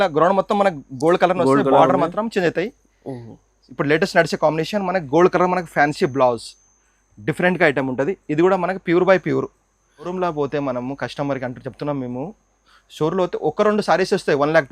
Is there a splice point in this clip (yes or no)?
yes